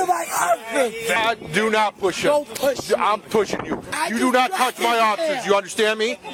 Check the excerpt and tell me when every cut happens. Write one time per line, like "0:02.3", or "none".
none